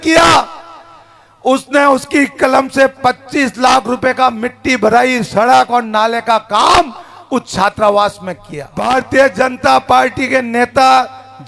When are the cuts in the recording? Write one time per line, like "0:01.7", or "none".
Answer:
0:08.8